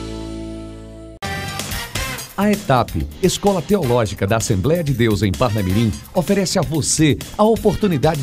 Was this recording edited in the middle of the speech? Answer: yes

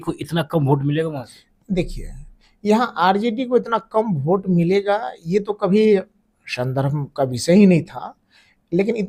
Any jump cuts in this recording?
no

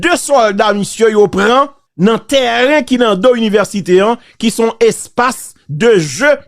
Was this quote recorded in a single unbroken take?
no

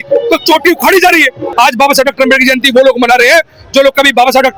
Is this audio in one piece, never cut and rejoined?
no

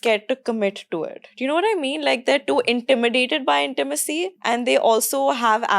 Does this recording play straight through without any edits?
no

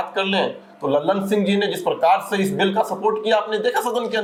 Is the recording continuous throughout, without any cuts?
yes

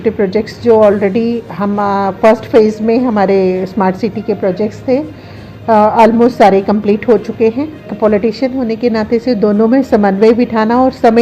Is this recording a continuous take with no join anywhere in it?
no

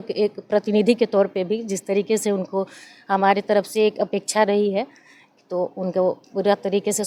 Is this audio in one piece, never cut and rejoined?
yes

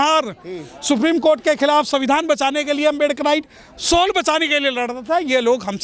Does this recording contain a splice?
no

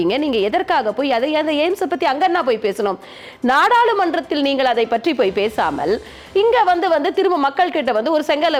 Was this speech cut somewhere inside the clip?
no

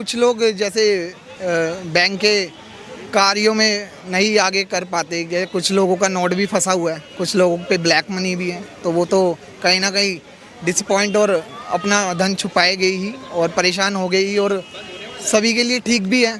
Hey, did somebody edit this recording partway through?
no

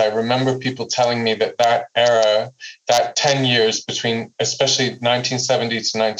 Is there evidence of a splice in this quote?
no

